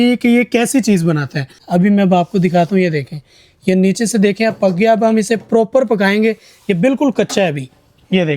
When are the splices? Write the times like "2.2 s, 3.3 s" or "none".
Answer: 1.6 s